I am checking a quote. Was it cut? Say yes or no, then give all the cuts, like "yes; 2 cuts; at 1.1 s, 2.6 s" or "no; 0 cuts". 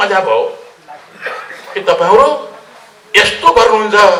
no; 0 cuts